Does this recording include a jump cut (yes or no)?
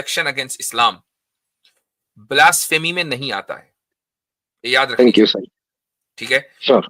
no